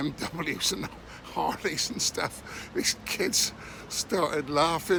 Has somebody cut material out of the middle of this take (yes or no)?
no